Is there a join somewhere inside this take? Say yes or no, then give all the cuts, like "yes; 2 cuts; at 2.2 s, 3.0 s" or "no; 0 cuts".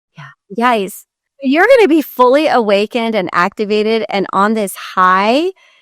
yes; 1 cut; at 1.3 s